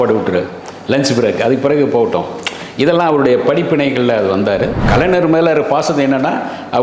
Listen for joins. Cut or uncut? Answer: cut